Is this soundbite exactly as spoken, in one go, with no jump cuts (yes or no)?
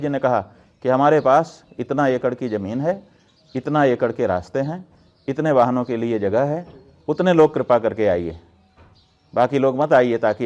yes